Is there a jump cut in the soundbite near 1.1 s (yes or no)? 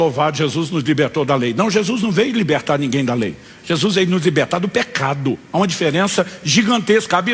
no